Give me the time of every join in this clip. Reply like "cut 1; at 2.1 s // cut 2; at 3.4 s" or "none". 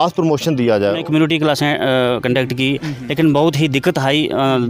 cut 1; at 1.0 s